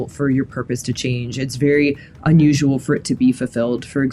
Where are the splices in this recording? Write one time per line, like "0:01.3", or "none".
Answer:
none